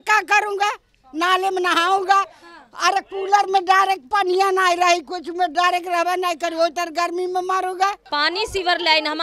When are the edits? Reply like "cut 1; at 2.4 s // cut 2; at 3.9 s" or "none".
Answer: cut 1; at 8.0 s